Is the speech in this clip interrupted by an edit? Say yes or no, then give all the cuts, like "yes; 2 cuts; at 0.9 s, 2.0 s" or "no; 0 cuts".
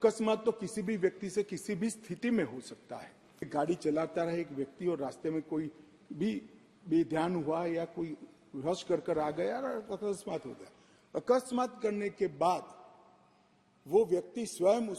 yes; 1 cut; at 3.5 s